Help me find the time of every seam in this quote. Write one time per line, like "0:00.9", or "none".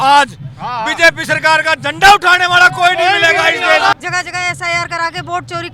0:03.9